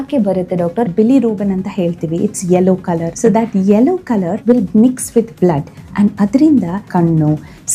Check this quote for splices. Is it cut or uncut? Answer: cut